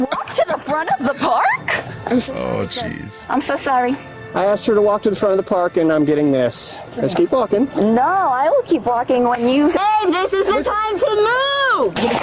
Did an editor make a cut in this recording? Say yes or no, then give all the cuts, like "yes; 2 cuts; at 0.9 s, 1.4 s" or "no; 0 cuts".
yes; 1 cut; at 9.8 s